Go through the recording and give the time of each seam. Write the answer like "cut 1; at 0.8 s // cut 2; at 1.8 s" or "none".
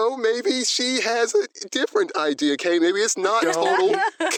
none